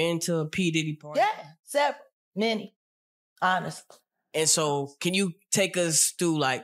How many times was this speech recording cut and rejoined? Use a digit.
0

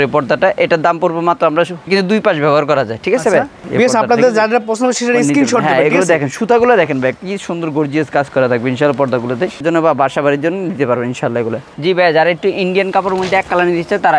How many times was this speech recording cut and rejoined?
4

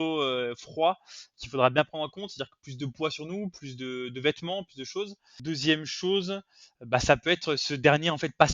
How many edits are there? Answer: 1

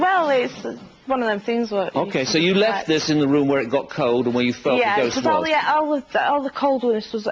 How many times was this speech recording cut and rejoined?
1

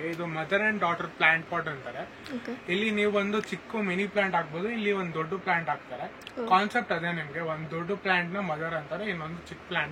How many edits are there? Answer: 0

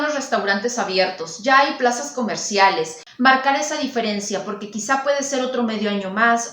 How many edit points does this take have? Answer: 1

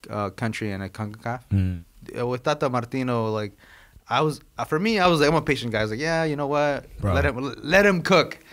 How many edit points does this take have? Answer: 1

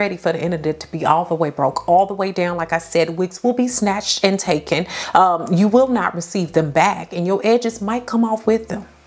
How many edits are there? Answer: 0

